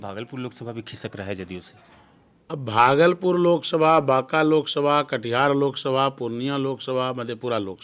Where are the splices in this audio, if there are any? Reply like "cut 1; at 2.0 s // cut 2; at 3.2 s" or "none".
none